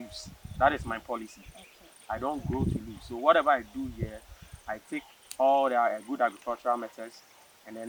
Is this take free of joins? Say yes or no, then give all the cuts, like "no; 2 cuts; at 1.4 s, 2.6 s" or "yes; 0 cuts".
yes; 0 cuts